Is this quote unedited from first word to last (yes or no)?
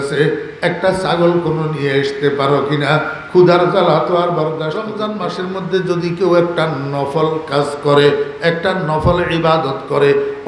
no